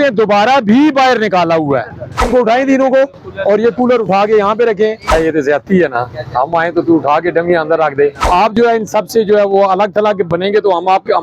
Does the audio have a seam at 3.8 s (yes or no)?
no